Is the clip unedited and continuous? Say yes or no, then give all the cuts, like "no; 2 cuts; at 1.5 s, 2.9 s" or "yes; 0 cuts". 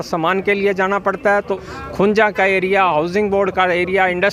no; 1 cut; at 1.6 s